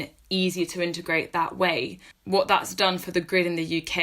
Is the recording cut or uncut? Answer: cut